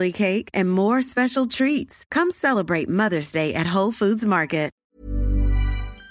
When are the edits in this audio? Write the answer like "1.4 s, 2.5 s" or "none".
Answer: 4.8 s